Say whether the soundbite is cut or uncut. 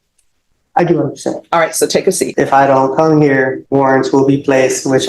cut